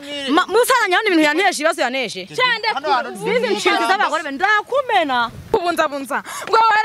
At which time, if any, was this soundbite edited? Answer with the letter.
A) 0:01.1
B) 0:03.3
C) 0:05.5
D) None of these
C